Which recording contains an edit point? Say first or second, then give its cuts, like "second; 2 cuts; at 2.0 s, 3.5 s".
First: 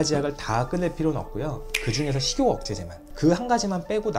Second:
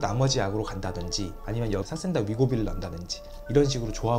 first; 1 cut; at 3.1 s